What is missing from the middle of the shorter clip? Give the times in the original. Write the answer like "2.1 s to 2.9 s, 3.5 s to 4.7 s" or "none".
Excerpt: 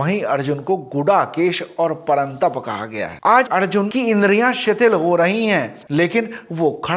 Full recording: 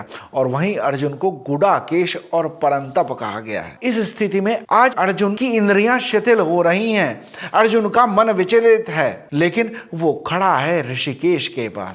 3.7 s to 4.6 s, 7.3 s to 9.2 s